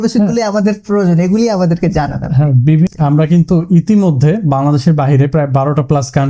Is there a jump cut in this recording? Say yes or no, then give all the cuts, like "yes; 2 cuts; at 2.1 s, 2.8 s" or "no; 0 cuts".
yes; 1 cut; at 2.9 s